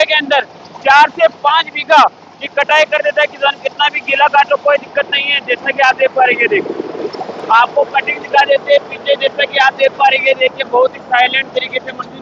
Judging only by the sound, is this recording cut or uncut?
uncut